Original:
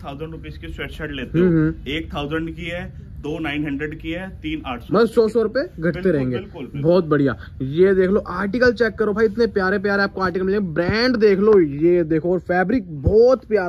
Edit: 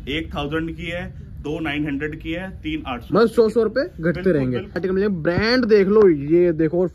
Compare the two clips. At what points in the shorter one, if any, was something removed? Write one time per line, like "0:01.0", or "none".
0:04.7